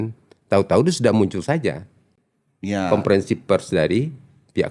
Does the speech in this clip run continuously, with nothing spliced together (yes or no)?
yes